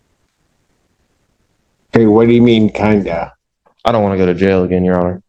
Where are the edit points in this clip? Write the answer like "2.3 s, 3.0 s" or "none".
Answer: none